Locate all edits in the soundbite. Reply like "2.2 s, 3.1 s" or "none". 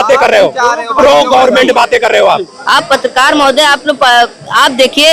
2.5 s